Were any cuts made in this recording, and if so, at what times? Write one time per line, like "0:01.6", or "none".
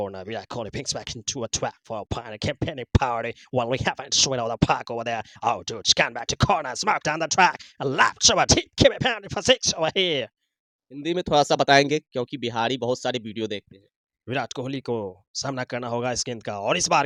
none